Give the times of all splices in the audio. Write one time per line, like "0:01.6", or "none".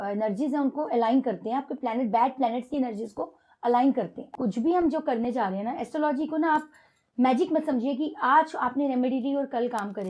0:04.3